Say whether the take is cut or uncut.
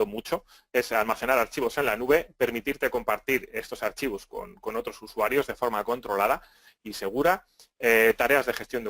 cut